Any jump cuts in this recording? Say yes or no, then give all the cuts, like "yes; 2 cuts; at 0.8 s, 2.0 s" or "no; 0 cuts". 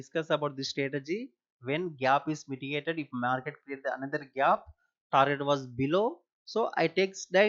no; 0 cuts